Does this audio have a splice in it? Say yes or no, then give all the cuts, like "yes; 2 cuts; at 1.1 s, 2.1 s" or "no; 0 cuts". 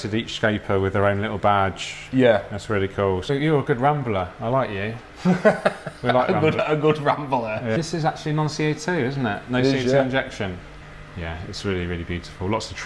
yes; 3 cuts; at 3.3 s, 7.8 s, 10.7 s